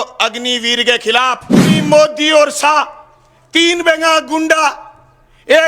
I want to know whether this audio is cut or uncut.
cut